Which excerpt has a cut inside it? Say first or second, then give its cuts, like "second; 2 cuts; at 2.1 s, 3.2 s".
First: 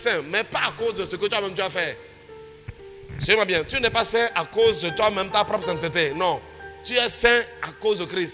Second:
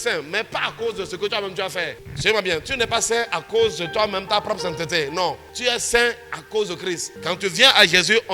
second; 3 cuts; at 2.0 s, 5.5 s, 7.1 s